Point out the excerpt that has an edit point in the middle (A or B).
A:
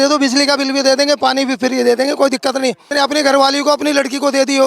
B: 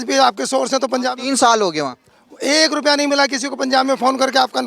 A